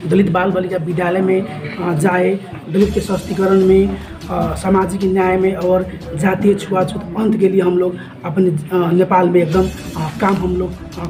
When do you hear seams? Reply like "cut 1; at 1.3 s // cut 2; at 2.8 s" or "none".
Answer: none